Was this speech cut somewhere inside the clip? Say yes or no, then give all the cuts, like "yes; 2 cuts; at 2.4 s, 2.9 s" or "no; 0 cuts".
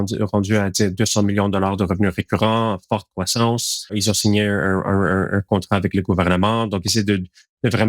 yes; 1 cut; at 3.9 s